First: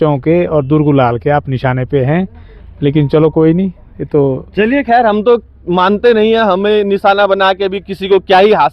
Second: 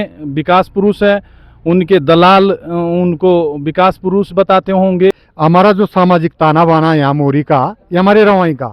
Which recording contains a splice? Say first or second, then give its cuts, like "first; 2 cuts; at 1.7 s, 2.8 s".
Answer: second; 1 cut; at 5.3 s